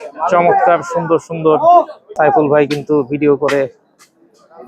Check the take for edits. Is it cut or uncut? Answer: cut